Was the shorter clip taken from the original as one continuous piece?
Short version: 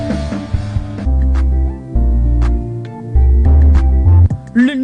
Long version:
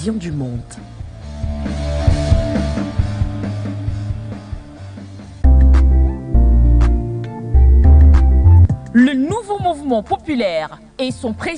no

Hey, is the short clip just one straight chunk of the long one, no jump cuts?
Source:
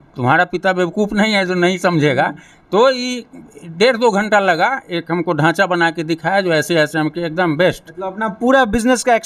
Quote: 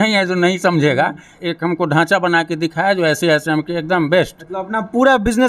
no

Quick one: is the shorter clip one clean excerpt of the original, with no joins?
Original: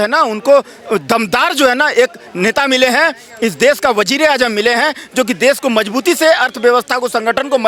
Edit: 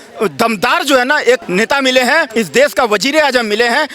no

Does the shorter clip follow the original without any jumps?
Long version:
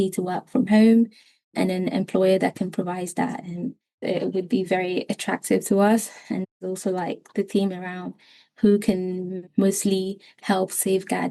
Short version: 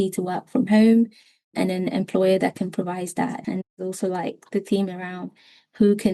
no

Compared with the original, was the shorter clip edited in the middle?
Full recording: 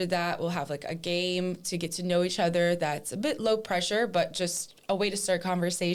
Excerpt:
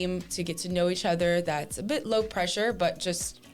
no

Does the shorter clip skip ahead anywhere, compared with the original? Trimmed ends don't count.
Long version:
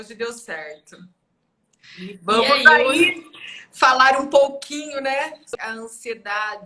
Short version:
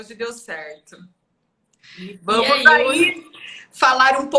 no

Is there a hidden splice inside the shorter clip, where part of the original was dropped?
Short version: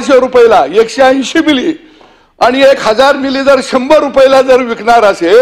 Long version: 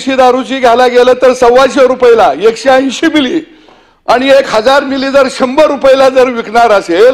no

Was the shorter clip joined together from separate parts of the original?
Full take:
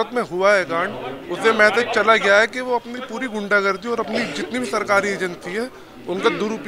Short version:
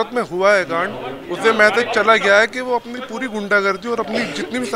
no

